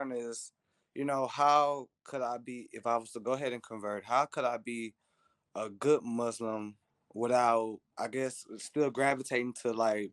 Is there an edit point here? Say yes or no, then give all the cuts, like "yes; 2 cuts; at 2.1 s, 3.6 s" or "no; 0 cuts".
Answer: no; 0 cuts